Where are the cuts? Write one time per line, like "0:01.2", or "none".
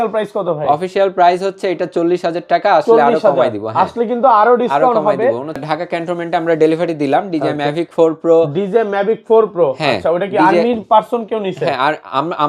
0:05.6